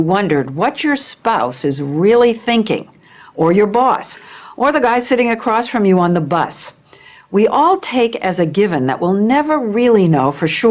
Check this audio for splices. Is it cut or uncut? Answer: uncut